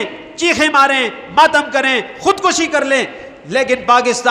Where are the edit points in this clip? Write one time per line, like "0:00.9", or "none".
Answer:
none

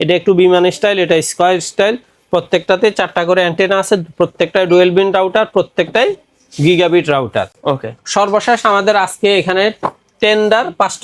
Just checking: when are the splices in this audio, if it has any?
none

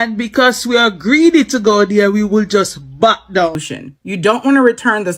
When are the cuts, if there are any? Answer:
0:03.6

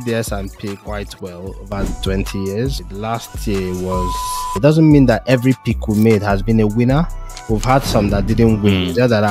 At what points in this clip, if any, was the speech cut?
0:02.9
0:04.5

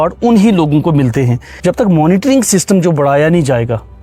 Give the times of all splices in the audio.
0:01.4

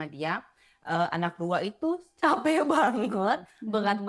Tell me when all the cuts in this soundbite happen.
none

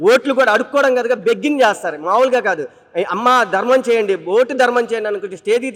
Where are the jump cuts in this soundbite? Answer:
none

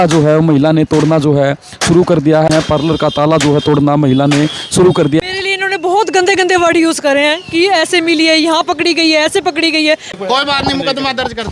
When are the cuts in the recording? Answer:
0:02.5
0:05.2
0:10.1

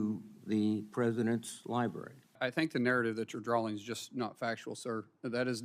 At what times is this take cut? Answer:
0:02.4

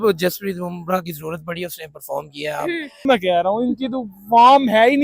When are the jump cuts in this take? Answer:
0:03.1

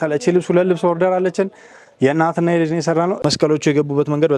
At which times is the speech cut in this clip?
0:03.2

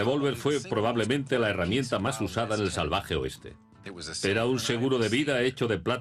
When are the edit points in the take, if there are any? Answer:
none

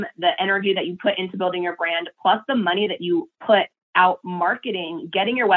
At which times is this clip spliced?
none

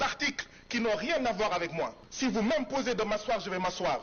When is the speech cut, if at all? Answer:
0:02.0

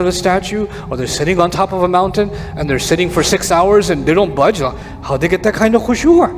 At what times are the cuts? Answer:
none

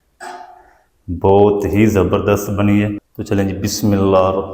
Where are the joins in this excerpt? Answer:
0:03.1

